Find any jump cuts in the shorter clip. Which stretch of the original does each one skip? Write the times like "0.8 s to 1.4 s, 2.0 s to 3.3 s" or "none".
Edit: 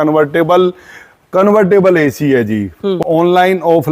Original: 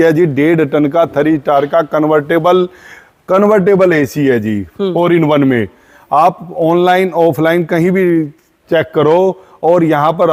4.9 s to 6.5 s

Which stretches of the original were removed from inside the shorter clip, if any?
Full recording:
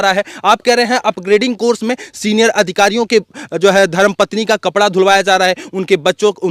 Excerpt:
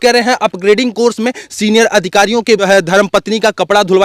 3.3 s to 3.7 s

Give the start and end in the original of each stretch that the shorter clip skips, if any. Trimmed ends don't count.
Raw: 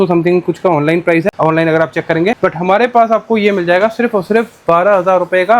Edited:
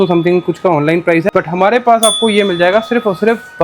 1.3 s to 2.4 s

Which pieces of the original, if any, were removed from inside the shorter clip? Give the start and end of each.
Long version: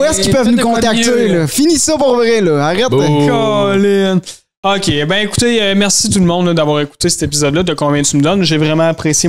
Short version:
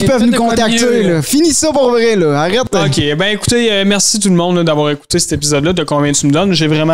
3.0 s to 4.6 s

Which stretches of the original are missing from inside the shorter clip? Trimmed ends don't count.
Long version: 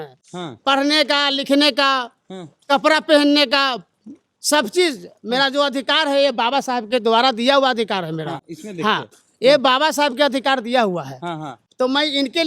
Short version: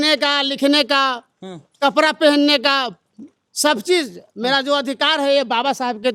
none

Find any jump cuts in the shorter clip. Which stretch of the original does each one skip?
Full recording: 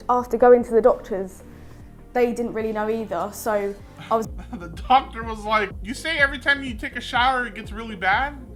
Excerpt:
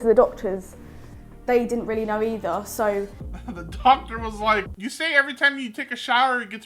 4.0 s to 4.3 s

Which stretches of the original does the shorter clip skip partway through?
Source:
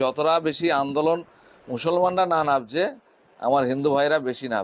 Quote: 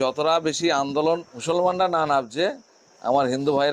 1.3 s to 1.7 s

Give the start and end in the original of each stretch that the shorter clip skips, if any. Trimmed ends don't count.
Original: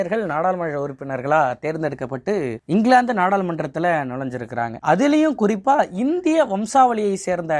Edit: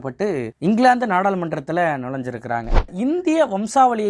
4.9 s to 5.8 s

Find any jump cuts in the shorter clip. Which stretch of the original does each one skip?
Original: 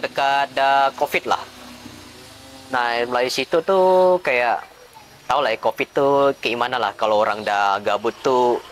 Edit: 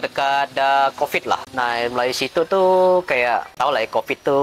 1.5 s to 2.6 s, 4.7 s to 5.2 s

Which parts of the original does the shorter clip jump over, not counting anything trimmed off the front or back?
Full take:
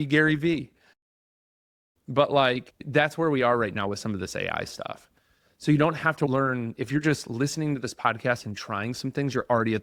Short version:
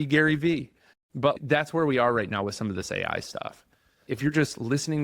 1.3 s to 2.7 s, 5.5 s to 6.7 s

